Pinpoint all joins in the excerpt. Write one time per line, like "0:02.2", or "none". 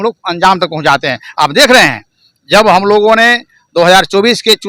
none